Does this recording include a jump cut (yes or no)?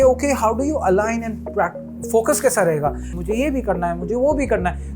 yes